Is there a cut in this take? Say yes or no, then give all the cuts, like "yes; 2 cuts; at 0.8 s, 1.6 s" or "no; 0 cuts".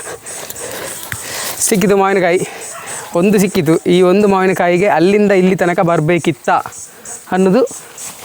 no; 0 cuts